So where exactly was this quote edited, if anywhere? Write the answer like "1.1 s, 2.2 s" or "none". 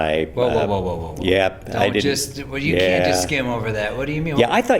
1.1 s